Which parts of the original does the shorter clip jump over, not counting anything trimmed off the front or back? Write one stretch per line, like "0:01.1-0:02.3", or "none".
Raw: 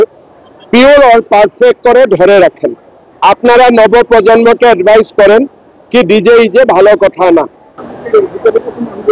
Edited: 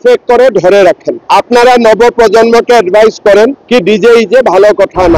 0:02.7-0:03.0
0:05.5-0:05.8